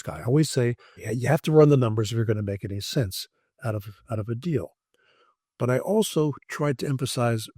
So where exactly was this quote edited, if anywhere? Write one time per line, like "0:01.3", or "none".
0:00.9